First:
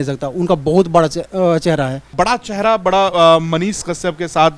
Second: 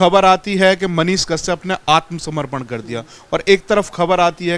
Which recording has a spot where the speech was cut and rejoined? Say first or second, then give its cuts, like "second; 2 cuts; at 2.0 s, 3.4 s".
first; 1 cut; at 2.1 s